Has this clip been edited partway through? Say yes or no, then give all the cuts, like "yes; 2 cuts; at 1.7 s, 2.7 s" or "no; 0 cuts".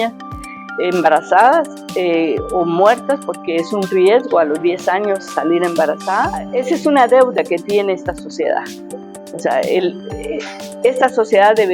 yes; 1 cut; at 6.4 s